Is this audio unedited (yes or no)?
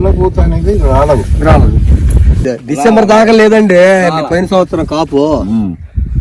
no